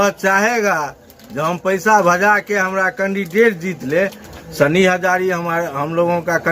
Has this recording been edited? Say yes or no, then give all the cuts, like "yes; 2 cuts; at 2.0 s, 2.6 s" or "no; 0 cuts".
yes; 1 cut; at 4.2 s